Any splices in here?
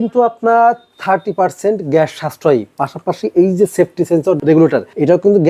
yes; 1 cut; at 4.5 s

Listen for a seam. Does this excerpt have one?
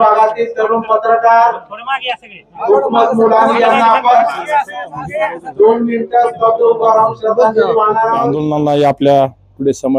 yes; 1 cut; at 8.3 s

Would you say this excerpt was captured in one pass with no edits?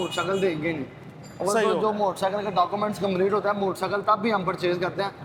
yes; 0 cuts

